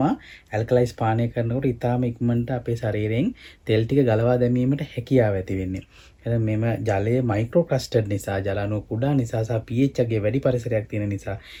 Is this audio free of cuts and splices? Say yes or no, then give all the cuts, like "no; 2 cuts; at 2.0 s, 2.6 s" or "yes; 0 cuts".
yes; 0 cuts